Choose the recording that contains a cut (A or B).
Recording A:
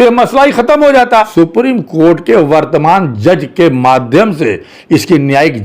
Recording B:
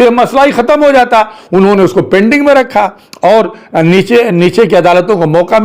A